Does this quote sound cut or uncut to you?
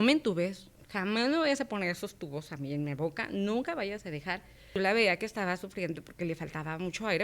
cut